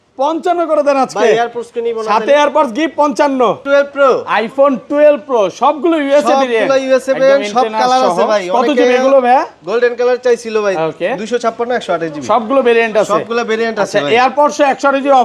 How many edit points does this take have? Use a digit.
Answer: 1